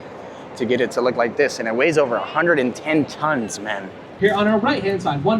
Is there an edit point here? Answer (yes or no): yes